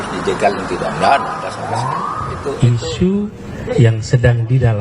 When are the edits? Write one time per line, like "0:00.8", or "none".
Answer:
0:02.6